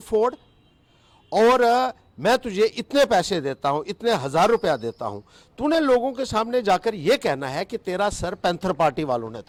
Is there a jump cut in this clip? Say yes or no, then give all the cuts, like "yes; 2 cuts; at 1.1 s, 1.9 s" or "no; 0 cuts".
no; 0 cuts